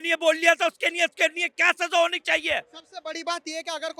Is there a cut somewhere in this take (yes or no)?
no